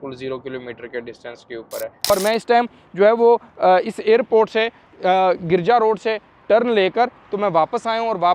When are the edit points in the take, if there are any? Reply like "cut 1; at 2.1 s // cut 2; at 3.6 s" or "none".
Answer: cut 1; at 2.0 s